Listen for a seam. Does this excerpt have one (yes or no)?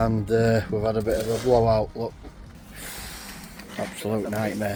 no